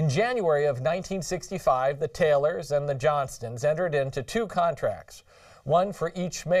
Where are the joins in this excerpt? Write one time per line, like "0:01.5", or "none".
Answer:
0:01.0